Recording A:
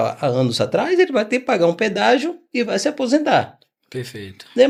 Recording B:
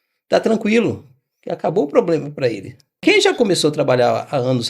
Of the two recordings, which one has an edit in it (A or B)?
B